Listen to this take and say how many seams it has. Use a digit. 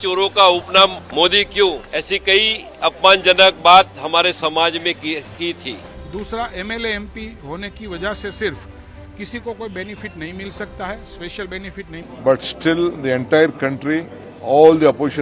4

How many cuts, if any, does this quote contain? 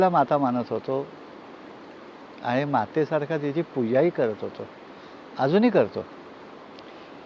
1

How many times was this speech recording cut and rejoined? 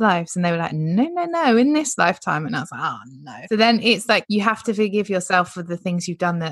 2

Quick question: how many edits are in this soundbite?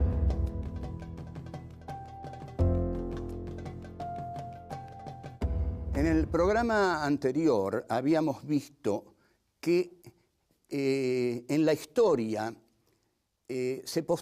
1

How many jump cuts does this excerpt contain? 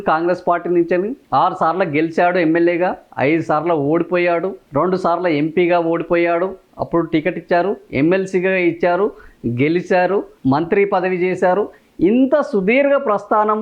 0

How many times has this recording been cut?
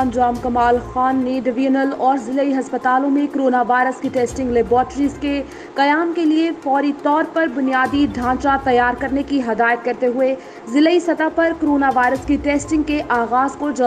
0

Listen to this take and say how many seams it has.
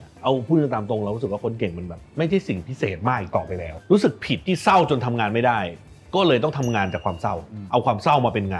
1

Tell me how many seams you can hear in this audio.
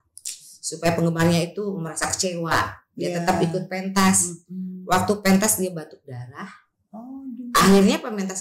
0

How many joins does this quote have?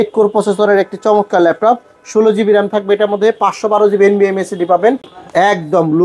1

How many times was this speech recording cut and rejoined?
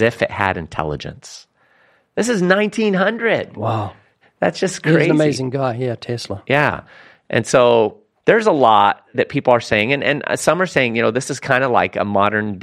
3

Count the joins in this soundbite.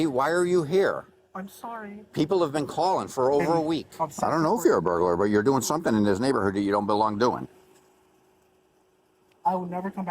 1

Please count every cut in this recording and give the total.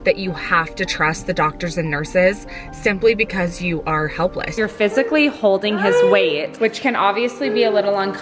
2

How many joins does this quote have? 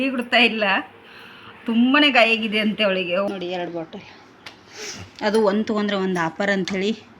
1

